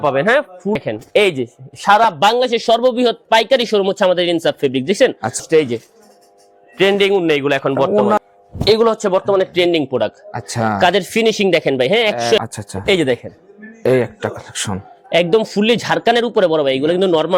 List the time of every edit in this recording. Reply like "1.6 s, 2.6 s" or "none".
0.8 s, 5.4 s, 8.2 s, 12.4 s